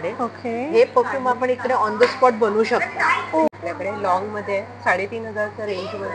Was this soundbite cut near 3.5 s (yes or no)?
yes